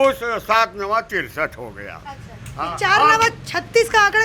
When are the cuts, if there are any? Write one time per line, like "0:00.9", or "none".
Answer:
none